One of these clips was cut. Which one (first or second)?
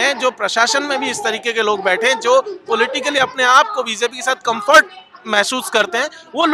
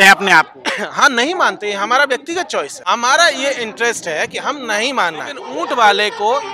second